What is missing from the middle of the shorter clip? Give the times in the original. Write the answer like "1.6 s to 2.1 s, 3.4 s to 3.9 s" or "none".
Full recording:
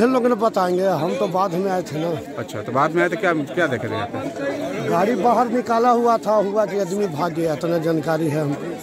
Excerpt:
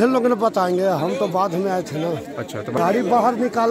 2.8 s to 4.9 s